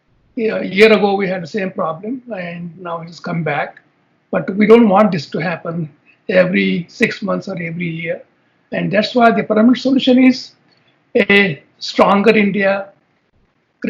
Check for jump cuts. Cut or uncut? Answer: uncut